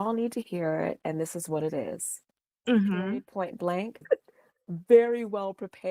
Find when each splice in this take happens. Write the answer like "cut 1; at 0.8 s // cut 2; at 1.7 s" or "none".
cut 1; at 4.0 s